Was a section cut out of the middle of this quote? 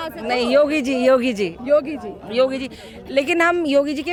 no; 0 cuts

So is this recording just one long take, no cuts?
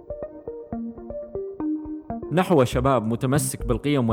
no; 1 cut; at 2.3 s

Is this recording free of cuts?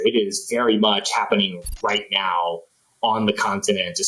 yes; 0 cuts

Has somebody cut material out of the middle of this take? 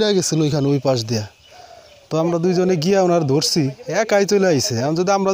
no; 0 cuts

